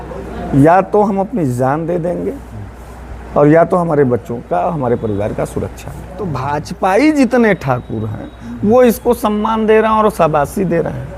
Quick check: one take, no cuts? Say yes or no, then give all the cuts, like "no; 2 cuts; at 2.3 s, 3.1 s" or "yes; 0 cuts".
no; 1 cut; at 6.4 s